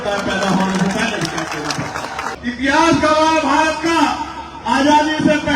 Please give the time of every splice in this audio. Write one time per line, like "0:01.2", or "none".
0:02.3